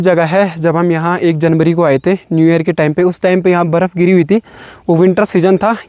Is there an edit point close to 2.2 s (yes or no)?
no